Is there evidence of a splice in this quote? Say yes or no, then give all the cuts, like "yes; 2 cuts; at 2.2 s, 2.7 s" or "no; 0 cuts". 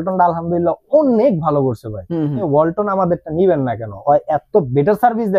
yes; 1 cut; at 2.4 s